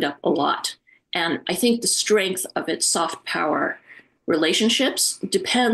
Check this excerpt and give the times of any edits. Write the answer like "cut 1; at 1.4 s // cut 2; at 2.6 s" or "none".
none